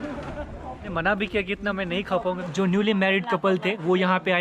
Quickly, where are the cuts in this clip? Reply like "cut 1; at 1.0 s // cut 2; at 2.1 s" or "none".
cut 1; at 0.9 s // cut 2; at 2.4 s